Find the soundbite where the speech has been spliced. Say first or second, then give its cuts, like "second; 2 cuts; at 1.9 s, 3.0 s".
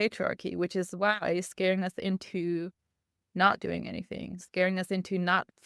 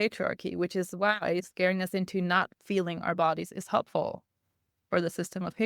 second; 1 cut; at 1.5 s